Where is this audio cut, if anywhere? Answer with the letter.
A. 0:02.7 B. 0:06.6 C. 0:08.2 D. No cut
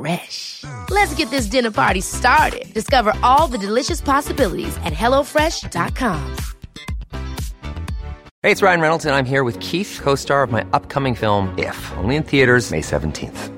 C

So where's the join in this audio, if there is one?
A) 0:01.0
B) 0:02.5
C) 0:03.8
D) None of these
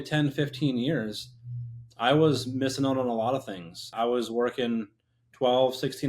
C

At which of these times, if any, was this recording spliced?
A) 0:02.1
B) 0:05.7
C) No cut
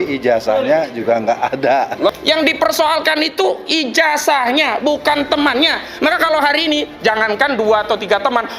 A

